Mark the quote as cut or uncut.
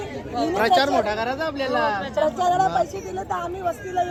uncut